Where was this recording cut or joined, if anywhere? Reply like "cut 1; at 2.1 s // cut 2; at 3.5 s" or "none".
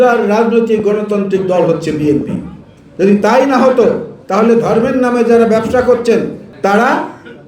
cut 1; at 6.4 s